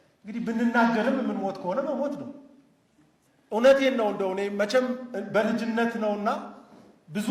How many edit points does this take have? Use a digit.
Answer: 0